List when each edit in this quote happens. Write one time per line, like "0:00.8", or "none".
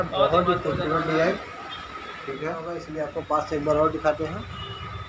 0:02.9